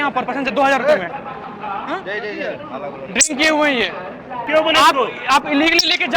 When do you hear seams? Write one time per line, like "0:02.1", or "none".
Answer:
0:01.4
0:04.4